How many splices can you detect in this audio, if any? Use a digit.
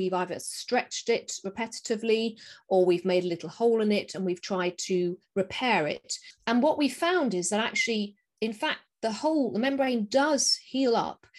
0